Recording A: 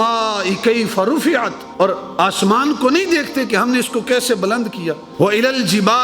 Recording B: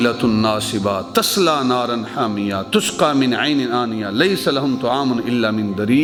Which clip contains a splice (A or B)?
A